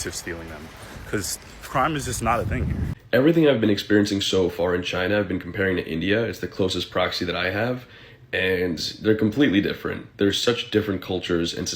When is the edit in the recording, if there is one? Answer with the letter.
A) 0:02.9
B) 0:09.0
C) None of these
A